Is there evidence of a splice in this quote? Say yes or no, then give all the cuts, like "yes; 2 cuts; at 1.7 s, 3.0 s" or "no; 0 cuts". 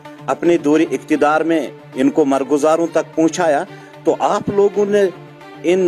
no; 0 cuts